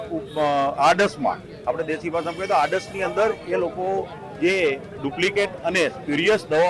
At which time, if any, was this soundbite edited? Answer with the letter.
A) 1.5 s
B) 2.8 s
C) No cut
C